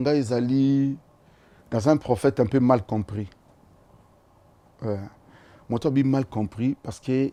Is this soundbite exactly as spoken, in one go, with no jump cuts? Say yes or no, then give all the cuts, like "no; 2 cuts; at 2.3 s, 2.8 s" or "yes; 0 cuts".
yes; 0 cuts